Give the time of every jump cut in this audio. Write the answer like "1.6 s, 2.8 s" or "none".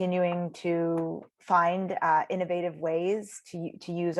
1.3 s